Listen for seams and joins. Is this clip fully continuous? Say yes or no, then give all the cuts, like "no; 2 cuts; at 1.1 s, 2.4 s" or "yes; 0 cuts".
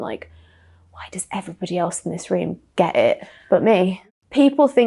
no; 1 cut; at 4.0 s